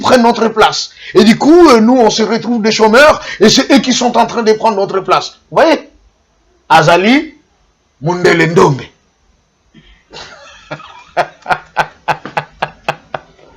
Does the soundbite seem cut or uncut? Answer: uncut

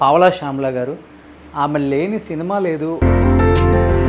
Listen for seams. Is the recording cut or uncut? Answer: cut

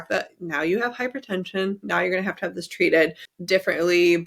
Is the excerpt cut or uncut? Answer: uncut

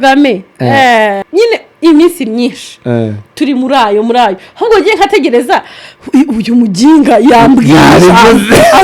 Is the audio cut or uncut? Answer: cut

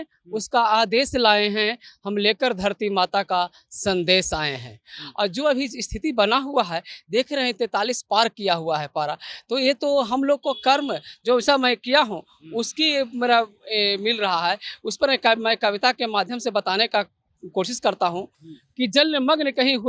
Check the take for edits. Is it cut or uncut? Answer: uncut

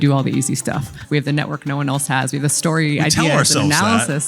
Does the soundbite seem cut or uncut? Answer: cut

